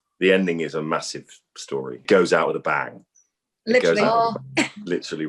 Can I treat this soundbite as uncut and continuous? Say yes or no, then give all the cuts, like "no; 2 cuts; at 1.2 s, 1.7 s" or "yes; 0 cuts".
no; 1 cut; at 2.0 s